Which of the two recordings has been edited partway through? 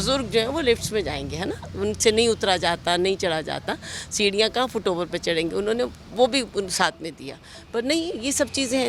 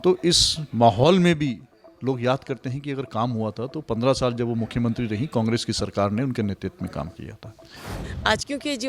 second; 1 cut; at 7.8 s

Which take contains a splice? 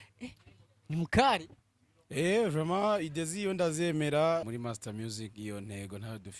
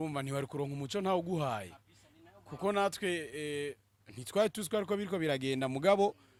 first; 1 cut; at 4.5 s

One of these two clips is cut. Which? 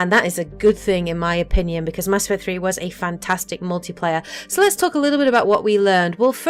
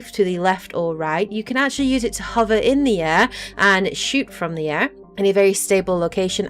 second; 1 cut; at 1.7 s

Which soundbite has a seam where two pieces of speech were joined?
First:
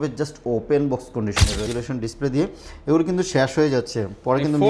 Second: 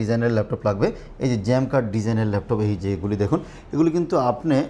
first; 1 cut; at 1.7 s

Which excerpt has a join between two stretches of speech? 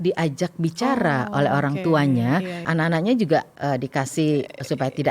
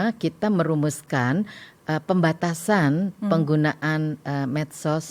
first; 1 cut; at 2.7 s

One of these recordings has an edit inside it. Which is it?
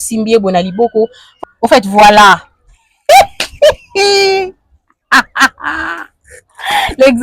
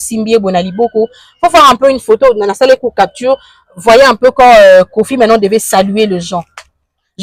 first; 1 cut; at 1.3 s

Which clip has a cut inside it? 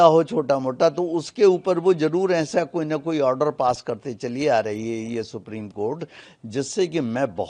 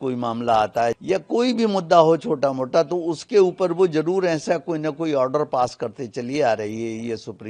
second; 1 cut; at 1.0 s

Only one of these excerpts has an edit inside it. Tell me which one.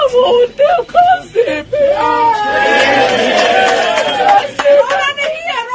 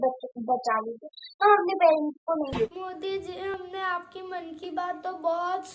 second; 1 cut; at 2.6 s

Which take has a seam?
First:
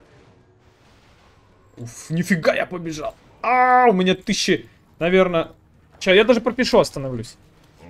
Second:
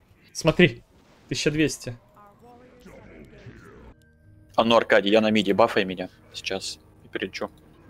second; 1 cut; at 3.9 s

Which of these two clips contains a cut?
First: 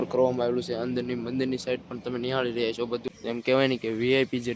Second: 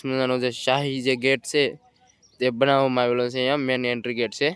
first; 1 cut; at 3.0 s

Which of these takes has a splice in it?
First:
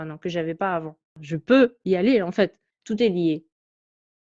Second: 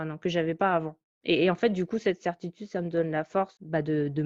first; 2 cuts; at 1.1 s, 2.6 s

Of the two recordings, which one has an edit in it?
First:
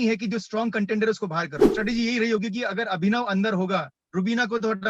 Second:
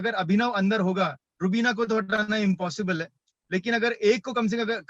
first; 1 cut; at 1.6 s

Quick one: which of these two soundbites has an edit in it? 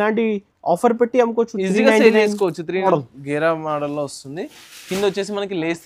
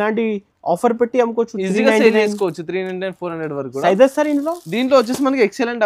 first; 1 cut; at 2.9 s

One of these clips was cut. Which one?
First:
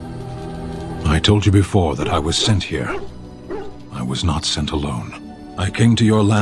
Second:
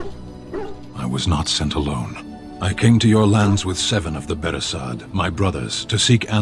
first; 1 cut; at 0.9 s

